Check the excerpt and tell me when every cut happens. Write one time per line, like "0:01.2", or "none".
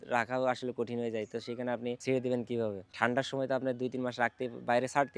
0:02.0
0:02.8